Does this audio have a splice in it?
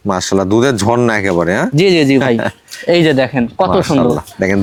no; 0 cuts

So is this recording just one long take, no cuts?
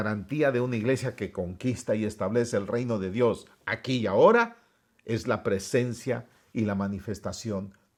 yes; 0 cuts

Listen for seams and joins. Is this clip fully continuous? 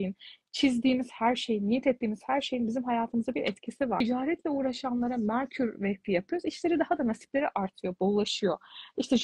no; 1 cut; at 4.0 s

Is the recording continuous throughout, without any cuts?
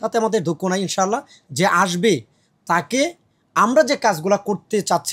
yes; 0 cuts

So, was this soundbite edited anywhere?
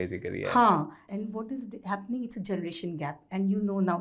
yes; 1 cut; at 1.0 s

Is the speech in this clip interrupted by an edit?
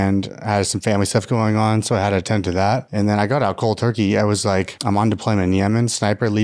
yes; 1 cut; at 4.7 s

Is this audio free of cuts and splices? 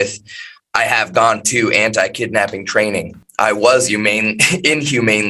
no; 1 cut; at 3.2 s

